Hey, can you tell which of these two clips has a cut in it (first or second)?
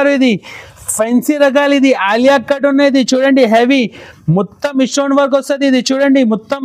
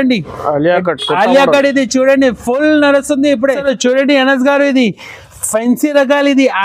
second